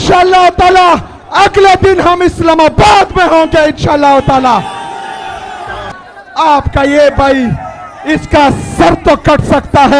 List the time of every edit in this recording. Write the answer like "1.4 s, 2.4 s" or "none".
5.9 s